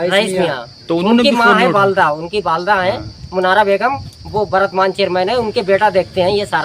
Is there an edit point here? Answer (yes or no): no